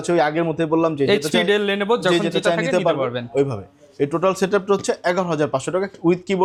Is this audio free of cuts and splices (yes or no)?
yes